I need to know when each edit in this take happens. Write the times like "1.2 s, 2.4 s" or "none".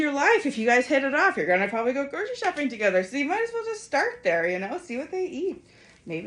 none